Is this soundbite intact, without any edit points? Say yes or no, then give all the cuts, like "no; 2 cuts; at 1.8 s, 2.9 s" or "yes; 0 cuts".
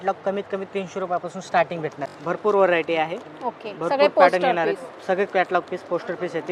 yes; 0 cuts